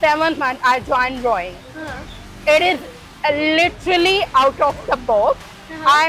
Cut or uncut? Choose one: uncut